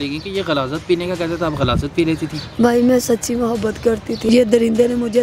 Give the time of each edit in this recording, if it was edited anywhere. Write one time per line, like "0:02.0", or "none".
0:04.3